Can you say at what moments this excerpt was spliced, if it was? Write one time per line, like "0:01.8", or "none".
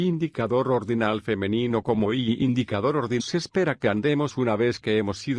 none